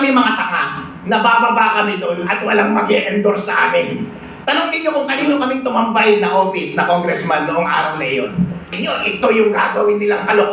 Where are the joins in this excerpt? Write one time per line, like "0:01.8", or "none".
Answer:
0:08.7